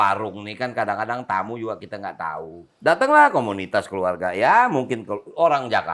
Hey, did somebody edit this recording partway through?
yes; 1 cut; at 2.6 s

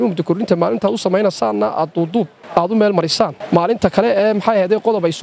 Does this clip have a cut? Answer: yes; 2 cuts; at 2.4 s, 3.4 s

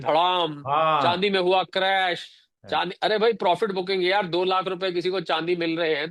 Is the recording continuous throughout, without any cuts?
yes; 0 cuts

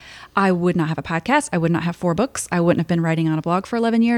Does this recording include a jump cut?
no; 0 cuts

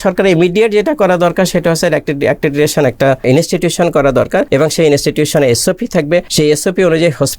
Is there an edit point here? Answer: yes; 3 cuts; at 3.2 s, 4.5 s, 6.3 s

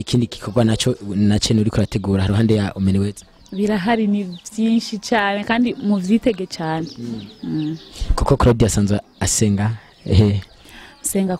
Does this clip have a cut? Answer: no; 0 cuts

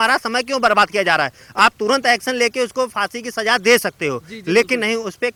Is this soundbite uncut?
yes; 0 cuts

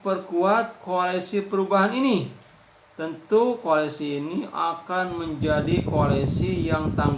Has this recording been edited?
no; 0 cuts

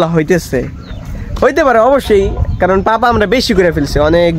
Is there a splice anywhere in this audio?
no; 0 cuts

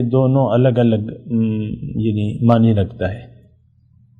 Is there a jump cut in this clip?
no; 0 cuts

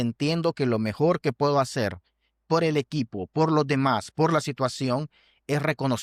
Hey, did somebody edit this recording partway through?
no; 0 cuts

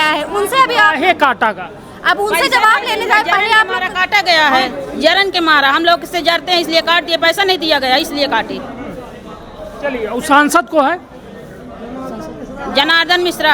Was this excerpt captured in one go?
yes; 0 cuts

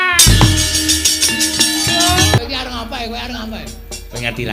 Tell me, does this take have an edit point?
yes; 1 cut; at 2.4 s

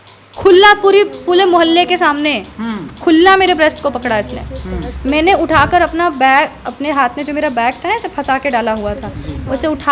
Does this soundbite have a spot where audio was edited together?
no; 0 cuts

